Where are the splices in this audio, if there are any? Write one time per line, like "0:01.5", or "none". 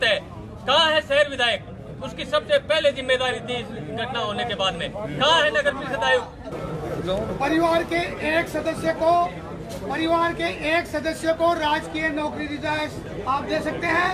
0:06.6